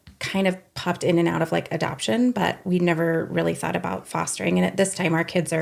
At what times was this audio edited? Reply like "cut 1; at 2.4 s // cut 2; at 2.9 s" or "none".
none

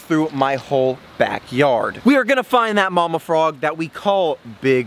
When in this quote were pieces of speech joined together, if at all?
none

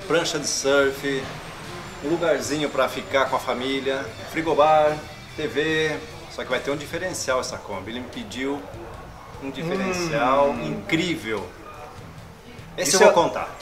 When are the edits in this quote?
cut 1; at 4.2 s // cut 2; at 6.2 s

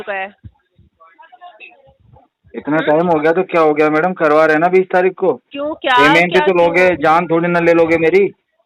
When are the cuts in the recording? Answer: none

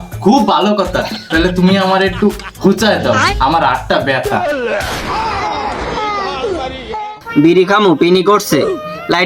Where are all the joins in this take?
cut 1; at 4.3 s // cut 2; at 7.1 s

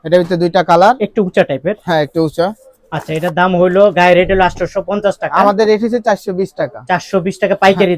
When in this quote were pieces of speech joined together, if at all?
none

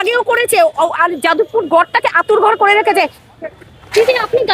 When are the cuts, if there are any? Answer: cut 1; at 3.2 s

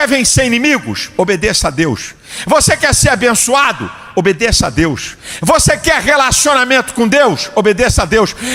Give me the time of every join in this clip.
none

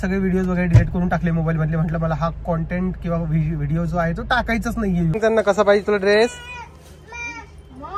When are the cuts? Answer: cut 1; at 5.1 s

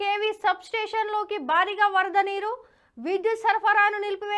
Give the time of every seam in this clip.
none

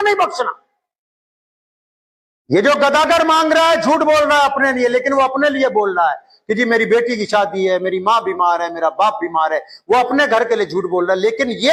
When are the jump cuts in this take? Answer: none

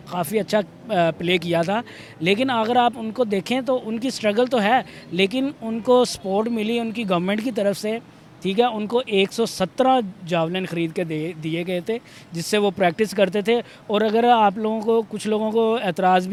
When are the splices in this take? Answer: none

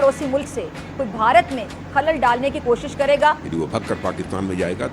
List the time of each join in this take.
cut 1; at 3.4 s

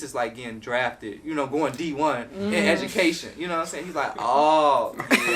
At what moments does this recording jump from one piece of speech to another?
none

